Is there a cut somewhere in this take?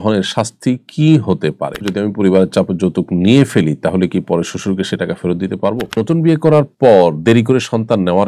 yes; 2 cuts; at 1.9 s, 6.0 s

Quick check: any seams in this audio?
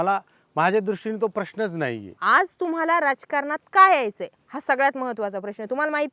yes; 1 cut; at 2.1 s

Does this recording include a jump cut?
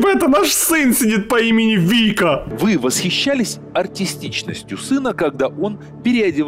yes; 1 cut; at 2.5 s

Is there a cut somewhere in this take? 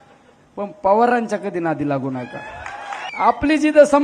yes; 1 cut; at 3.0 s

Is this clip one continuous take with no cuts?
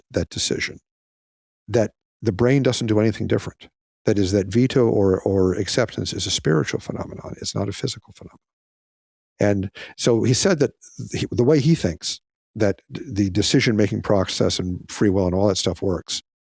yes; 0 cuts

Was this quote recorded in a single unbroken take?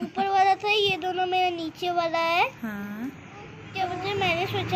no; 1 cut; at 3.6 s

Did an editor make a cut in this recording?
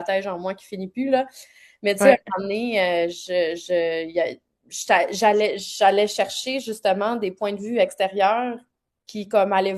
no; 0 cuts

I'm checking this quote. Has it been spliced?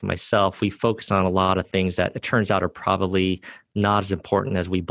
no; 0 cuts

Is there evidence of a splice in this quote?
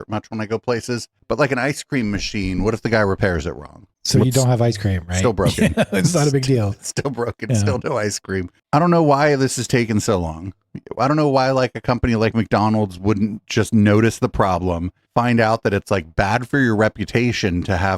yes; 2 cuts; at 1.1 s, 8.6 s

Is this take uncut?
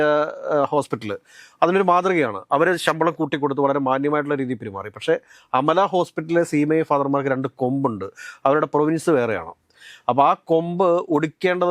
yes; 0 cuts

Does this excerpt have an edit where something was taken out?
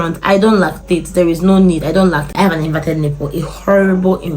yes; 1 cut; at 2.2 s

